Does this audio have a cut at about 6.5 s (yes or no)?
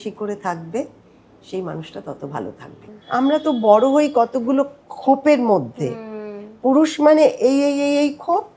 no